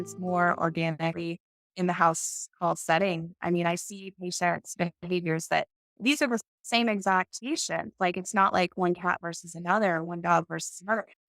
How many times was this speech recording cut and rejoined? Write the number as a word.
zero